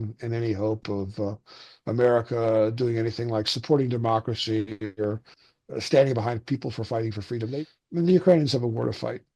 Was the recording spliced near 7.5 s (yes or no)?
yes